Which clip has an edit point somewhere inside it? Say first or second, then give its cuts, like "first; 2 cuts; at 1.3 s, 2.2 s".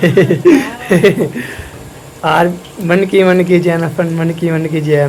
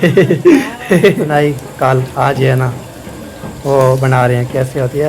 second; 1 cut; at 1.3 s